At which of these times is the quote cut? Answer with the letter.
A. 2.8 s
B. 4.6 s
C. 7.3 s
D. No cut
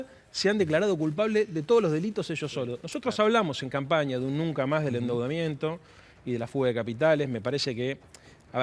A